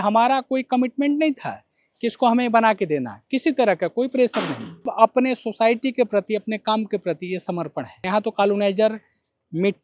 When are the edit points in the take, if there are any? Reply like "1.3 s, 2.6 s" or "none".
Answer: 4.9 s, 8.1 s